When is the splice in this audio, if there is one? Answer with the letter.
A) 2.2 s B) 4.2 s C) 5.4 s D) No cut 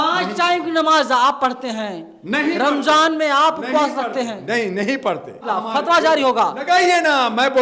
C